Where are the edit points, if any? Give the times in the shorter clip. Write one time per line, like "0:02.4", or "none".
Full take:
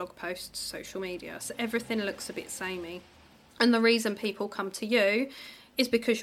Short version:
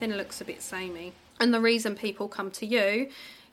0:01.2